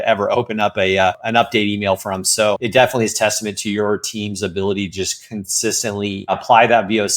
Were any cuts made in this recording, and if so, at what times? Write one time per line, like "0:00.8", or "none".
0:01.2
0:02.6
0:06.4